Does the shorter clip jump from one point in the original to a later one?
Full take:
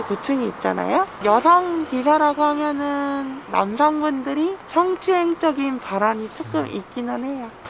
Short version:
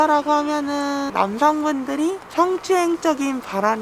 yes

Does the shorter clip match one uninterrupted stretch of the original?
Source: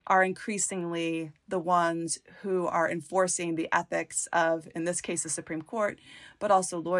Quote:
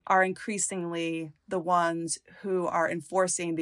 yes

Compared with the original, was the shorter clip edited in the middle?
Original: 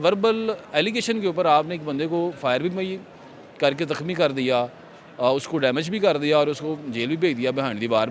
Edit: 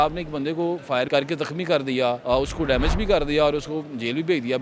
yes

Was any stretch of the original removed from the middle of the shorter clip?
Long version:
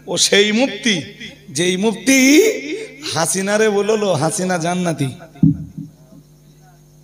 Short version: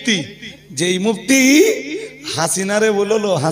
no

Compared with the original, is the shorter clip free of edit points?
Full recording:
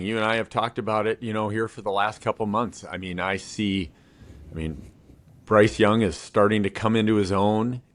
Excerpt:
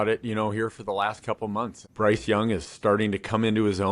no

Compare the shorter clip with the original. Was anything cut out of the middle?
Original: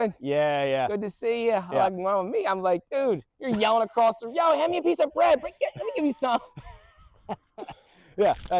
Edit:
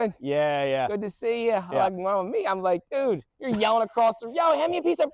no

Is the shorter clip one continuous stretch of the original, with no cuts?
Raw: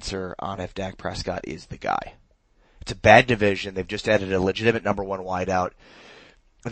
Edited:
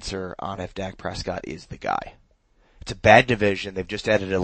yes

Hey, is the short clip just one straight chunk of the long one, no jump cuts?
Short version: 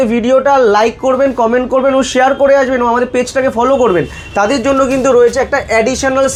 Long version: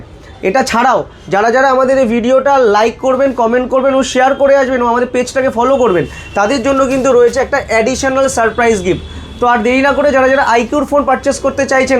yes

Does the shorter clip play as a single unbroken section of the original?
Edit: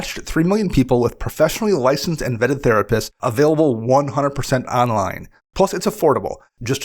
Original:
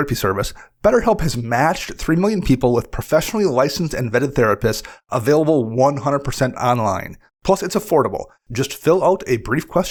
no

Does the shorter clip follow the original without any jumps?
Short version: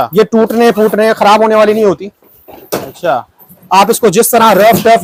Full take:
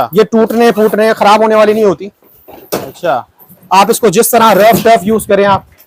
yes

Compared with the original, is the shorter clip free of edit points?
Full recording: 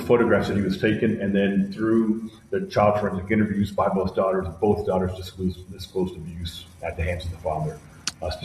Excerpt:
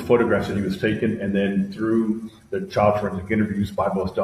yes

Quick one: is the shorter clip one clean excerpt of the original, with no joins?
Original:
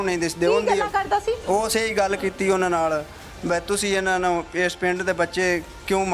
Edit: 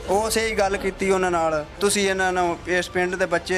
no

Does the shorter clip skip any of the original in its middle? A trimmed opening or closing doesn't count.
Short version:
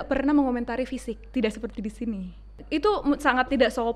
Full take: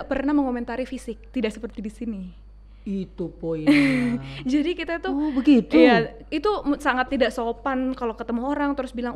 yes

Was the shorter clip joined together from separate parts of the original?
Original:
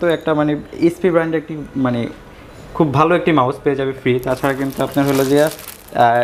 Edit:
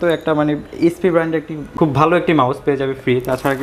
yes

